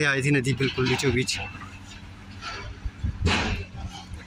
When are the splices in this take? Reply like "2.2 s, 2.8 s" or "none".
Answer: none